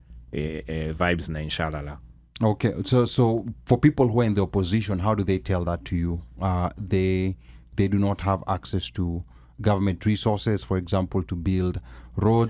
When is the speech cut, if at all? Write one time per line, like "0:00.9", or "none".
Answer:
none